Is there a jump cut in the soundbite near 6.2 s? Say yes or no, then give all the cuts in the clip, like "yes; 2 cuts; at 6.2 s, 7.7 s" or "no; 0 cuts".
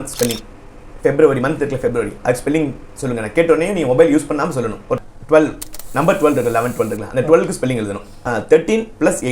no; 2 cuts; at 5.0 s, 8.4 s